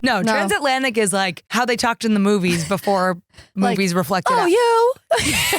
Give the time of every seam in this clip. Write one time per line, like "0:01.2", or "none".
0:01.4